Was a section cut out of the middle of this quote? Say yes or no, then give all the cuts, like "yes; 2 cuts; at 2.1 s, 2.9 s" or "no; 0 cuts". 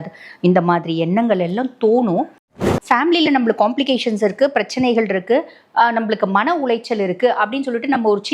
yes; 1 cut; at 2.5 s